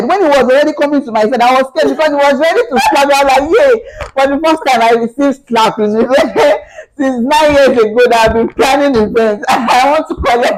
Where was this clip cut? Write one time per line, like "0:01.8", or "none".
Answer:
none